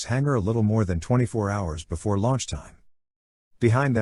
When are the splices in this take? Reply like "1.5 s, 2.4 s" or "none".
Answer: none